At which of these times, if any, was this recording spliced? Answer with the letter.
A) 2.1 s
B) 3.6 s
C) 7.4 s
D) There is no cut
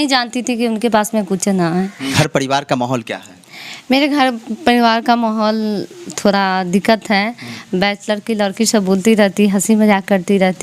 A